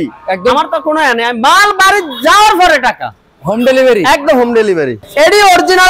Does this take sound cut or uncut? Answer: cut